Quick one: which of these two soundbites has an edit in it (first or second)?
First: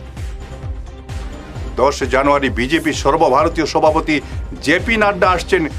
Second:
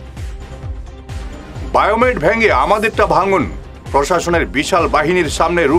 second